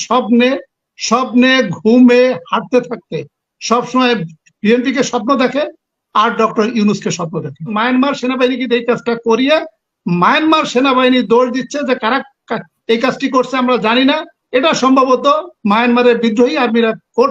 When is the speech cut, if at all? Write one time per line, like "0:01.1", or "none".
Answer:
0:07.7